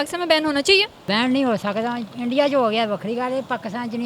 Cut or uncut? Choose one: cut